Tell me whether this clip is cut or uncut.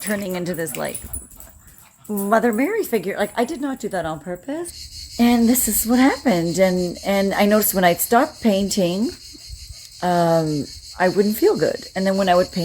cut